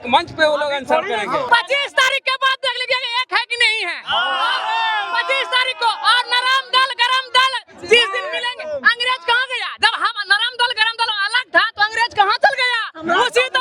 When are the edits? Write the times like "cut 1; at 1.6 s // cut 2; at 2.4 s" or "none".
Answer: cut 1; at 1.5 s